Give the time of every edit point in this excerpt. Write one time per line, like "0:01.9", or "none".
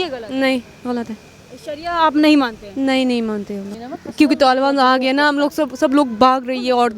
0:03.7